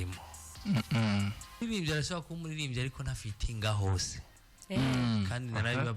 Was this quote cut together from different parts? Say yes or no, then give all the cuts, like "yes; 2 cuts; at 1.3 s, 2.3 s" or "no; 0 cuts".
yes; 1 cut; at 1.6 s